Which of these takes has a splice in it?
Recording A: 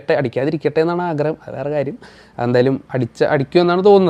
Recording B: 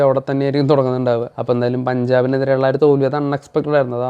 B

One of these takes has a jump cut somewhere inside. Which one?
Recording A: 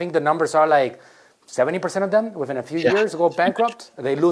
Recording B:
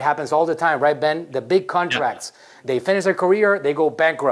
B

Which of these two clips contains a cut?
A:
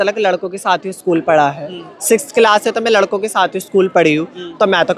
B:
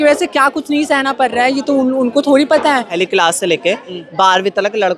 B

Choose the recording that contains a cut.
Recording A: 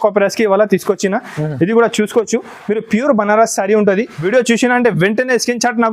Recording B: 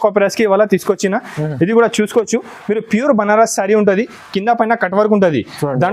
A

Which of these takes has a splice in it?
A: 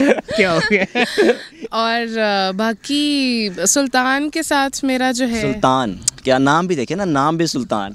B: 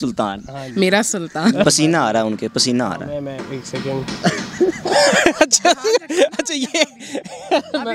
B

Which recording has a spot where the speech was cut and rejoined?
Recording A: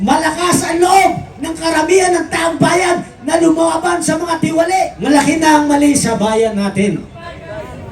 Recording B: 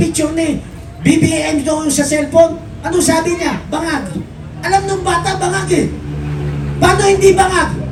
A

